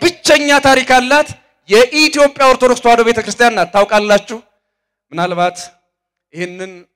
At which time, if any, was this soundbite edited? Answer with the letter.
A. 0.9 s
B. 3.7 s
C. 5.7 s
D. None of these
D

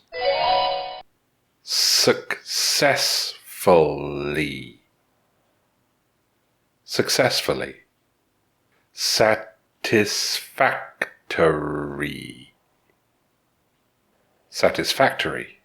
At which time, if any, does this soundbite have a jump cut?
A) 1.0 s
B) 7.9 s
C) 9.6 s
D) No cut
A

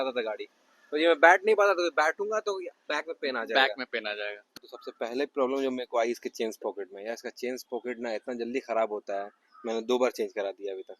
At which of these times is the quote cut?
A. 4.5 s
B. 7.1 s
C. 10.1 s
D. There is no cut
A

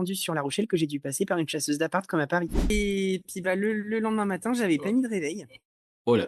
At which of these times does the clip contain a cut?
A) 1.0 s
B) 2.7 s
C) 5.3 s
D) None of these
B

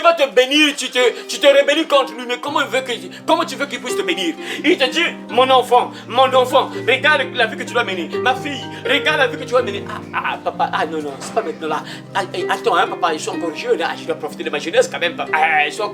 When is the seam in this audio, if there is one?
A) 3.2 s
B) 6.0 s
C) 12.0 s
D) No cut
D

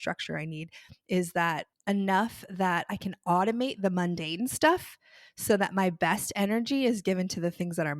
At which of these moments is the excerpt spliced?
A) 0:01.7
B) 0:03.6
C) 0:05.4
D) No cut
A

